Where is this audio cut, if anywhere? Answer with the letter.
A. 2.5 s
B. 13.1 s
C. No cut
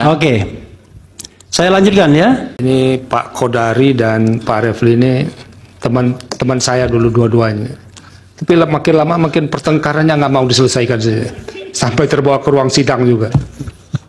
A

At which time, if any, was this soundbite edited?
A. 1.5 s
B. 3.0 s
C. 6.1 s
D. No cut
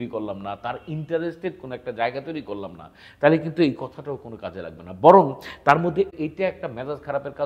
C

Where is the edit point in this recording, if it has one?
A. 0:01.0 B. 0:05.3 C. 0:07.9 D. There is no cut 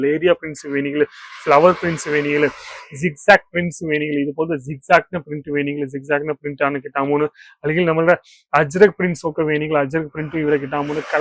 D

